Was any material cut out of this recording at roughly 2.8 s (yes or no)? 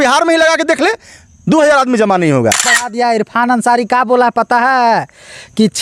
yes